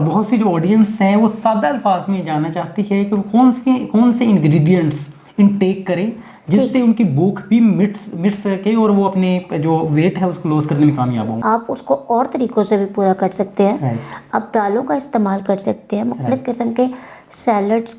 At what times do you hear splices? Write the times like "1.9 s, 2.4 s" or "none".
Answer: 11.3 s